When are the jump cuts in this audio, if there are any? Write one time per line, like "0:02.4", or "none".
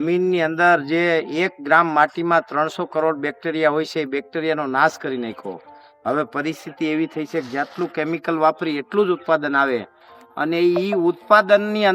none